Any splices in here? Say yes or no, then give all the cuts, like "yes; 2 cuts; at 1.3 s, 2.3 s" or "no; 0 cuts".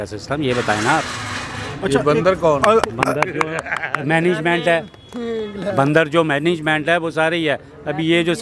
no; 0 cuts